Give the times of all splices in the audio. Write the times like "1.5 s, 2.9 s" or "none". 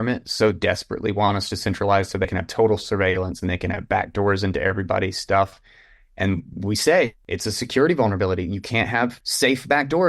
2.3 s, 7.2 s, 9.2 s